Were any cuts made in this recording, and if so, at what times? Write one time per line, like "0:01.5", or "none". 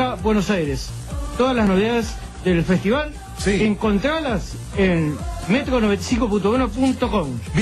0:06.5